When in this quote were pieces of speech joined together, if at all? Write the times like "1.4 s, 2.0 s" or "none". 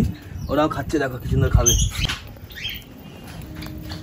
2.0 s